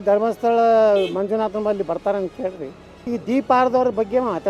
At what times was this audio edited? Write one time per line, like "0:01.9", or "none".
0:03.1